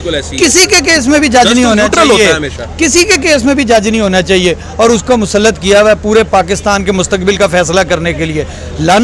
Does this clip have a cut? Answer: no; 0 cuts

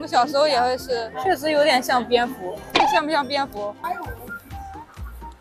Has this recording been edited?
yes; 1 cut; at 3.8 s

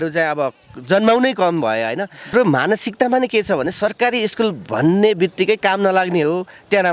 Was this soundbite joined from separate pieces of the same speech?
yes; 1 cut; at 2.3 s

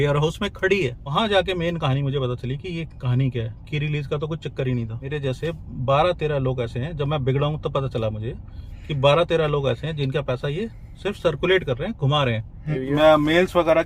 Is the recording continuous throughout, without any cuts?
no; 3 cuts; at 1.1 s, 5.1 s, 12.8 s

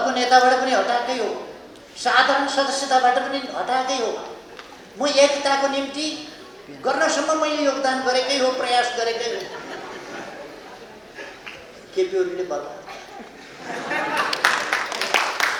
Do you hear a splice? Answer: no; 0 cuts

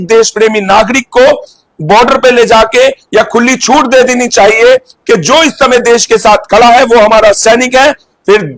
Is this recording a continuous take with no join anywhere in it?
yes; 0 cuts

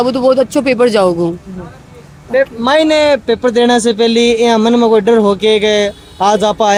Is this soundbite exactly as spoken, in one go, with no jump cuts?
yes; 0 cuts

